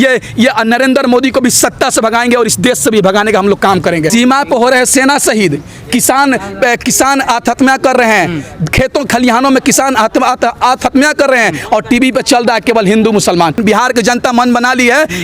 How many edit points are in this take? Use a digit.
2